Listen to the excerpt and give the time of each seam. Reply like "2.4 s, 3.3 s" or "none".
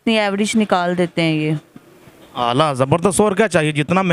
none